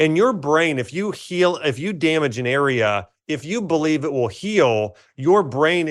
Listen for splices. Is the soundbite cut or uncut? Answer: uncut